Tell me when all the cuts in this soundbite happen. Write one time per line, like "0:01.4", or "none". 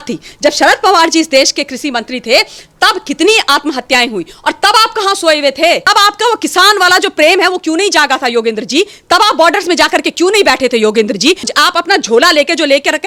none